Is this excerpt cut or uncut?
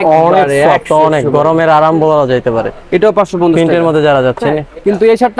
uncut